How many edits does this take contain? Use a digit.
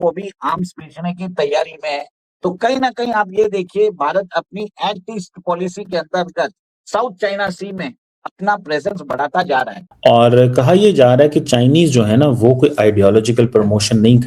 1